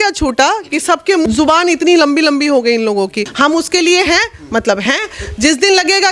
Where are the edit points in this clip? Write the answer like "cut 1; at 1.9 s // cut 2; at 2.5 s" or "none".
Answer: cut 1; at 1.2 s // cut 2; at 3.2 s